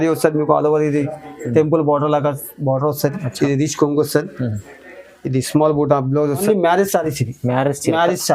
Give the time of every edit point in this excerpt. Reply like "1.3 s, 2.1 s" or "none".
6.4 s

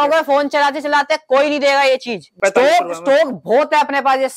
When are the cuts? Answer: 2.3 s

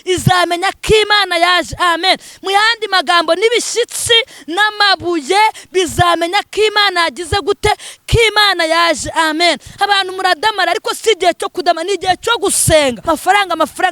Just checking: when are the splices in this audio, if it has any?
13.0 s

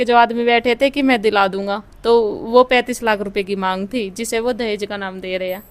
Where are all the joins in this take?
none

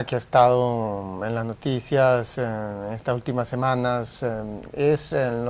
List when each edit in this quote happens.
4.1 s

